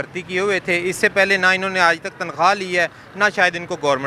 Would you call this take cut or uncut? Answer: uncut